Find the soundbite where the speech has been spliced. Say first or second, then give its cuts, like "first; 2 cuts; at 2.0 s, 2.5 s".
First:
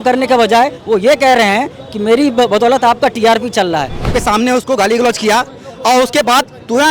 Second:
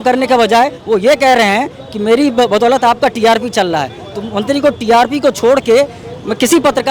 first; 1 cut; at 4.1 s